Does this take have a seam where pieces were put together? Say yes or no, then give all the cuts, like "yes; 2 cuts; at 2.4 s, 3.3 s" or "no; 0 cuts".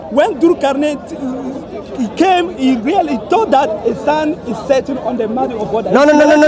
no; 0 cuts